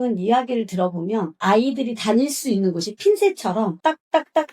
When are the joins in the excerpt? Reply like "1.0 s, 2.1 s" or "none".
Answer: 1.3 s